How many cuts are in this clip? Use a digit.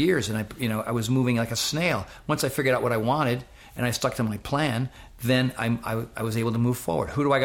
0